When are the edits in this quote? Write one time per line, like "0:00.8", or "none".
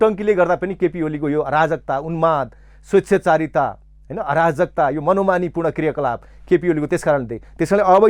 none

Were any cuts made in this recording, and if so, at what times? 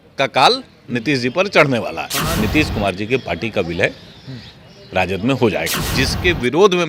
0:02.4
0:05.8

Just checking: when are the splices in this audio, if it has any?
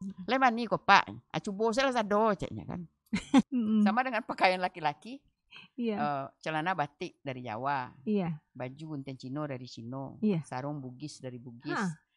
0:03.4

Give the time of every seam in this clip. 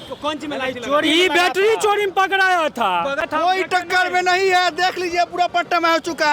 0:03.2

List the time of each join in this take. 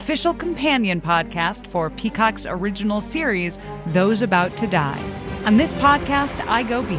0:05.3

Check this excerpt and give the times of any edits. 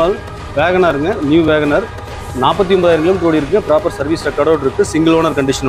none

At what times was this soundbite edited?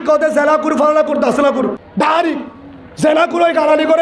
0:01.8

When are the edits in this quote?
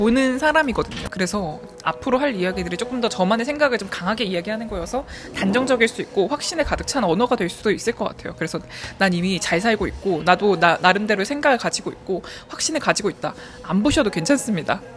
0:01.0

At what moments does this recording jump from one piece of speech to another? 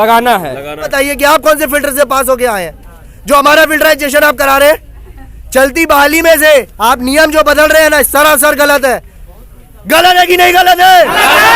0:00.9

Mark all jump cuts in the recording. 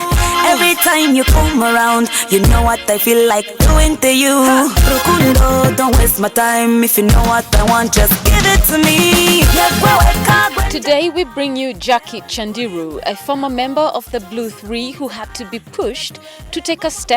none

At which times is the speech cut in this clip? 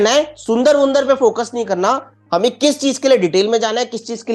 none

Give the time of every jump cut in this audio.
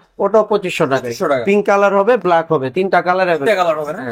none

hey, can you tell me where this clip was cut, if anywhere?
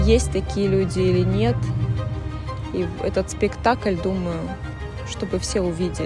none

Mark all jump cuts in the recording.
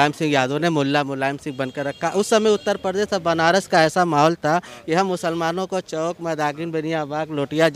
none

